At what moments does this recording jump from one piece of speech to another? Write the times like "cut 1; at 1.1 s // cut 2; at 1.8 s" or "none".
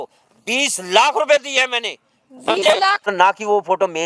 cut 1; at 3.1 s